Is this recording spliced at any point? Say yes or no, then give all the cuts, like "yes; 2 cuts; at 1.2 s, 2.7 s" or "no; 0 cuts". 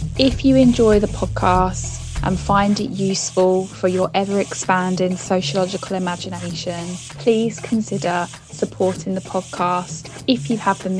no; 0 cuts